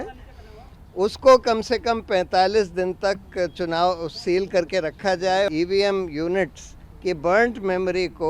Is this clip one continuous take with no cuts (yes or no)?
no